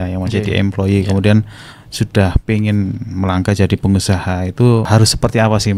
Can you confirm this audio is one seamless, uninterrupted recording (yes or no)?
no